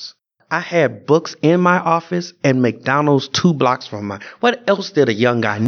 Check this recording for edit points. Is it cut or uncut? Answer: uncut